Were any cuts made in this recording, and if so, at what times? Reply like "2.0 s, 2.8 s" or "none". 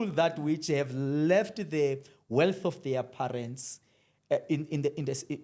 none